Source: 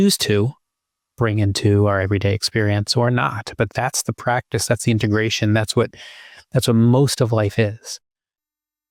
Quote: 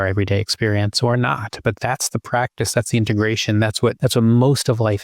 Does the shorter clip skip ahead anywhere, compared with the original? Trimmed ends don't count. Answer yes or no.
yes